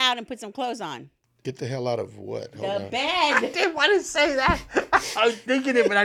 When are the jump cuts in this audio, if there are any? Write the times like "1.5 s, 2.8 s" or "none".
none